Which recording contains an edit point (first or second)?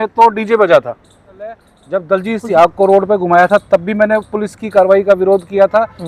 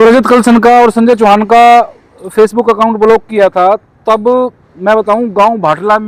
first